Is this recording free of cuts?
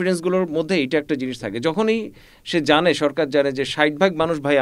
yes; 0 cuts

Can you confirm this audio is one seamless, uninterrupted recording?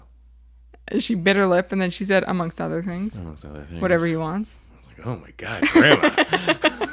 yes; 0 cuts

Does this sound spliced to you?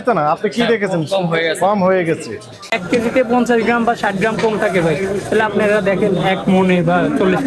yes; 1 cut; at 2.7 s

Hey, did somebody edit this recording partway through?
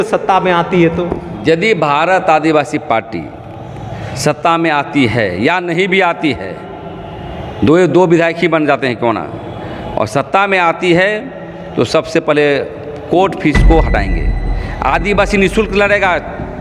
no; 0 cuts

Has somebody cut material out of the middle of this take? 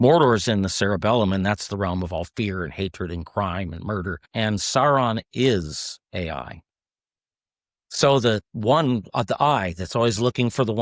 yes; 1 cut; at 4.2 s

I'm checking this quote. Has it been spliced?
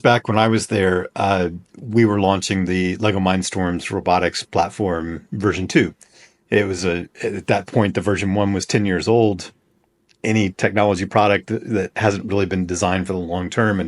no; 0 cuts

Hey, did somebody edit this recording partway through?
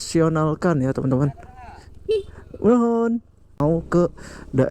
yes; 1 cut; at 3.6 s

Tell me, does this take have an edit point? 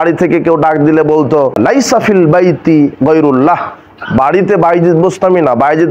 yes; 1 cut; at 1.6 s

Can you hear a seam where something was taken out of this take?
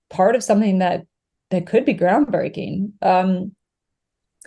no; 0 cuts

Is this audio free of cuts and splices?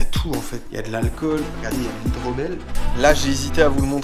no; 1 cut; at 2.8 s

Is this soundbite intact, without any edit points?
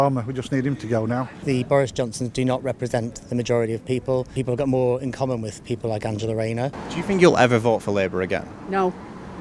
no; 3 cuts; at 1.4 s, 4.3 s, 6.8 s

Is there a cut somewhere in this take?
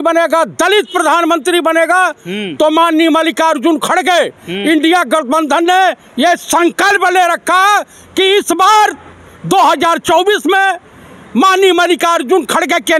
no; 0 cuts

